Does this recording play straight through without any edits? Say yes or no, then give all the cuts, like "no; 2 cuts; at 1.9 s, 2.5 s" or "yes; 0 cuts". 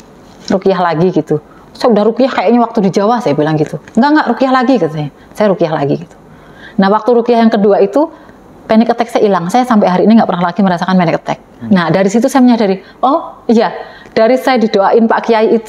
yes; 0 cuts